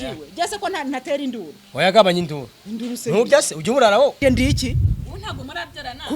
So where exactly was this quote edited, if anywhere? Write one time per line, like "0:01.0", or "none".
0:04.2